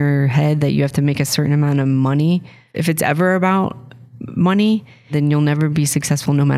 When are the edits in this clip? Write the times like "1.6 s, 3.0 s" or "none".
2.6 s, 5.1 s